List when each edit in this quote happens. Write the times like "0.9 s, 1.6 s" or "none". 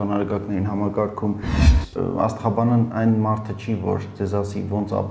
1.9 s